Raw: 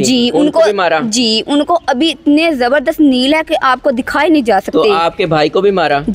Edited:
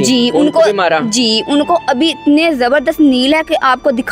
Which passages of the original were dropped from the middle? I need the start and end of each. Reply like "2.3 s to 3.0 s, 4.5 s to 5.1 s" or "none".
none